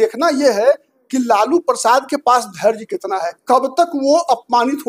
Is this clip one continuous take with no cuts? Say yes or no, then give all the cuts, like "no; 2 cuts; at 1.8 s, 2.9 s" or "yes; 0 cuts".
yes; 0 cuts